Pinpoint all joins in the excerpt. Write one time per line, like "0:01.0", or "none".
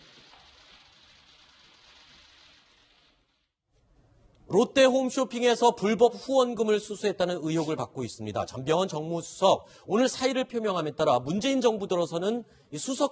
0:05.5